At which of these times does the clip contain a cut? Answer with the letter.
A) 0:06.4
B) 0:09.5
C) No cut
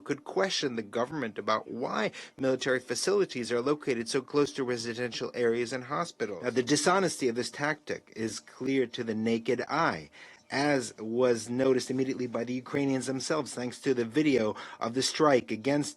A